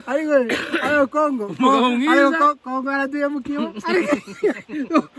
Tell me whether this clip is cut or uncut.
uncut